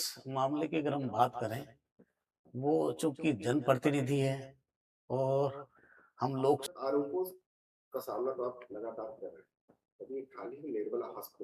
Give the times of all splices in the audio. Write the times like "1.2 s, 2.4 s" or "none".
6.7 s